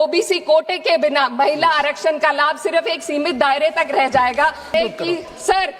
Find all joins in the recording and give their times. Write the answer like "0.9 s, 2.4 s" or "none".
4.8 s